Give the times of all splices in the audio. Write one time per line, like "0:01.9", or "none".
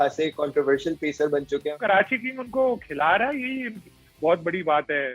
0:01.7